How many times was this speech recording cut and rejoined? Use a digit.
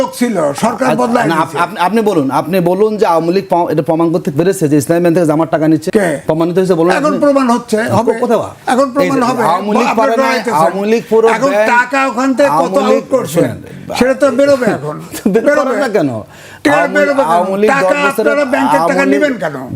1